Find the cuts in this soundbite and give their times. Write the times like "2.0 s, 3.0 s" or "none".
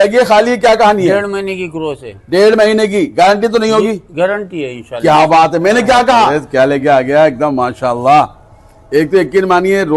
6.4 s